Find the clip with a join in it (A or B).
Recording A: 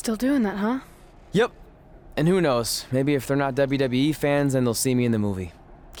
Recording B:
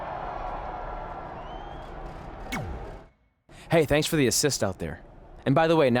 B